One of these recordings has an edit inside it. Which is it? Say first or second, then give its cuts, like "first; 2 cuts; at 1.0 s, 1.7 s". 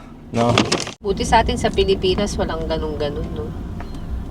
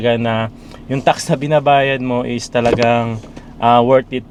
first; 1 cut; at 0.9 s